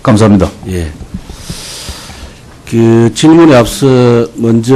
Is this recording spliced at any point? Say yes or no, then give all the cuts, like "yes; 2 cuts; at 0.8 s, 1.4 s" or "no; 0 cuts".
no; 0 cuts